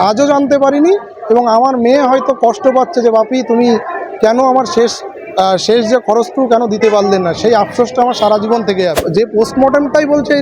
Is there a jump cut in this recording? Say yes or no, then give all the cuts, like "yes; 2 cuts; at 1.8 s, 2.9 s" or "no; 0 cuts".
yes; 1 cut; at 9.1 s